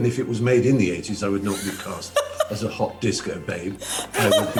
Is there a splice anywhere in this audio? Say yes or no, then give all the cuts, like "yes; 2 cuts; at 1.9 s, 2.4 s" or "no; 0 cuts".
no; 0 cuts